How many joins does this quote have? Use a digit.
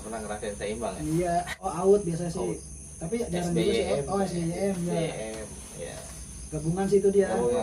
1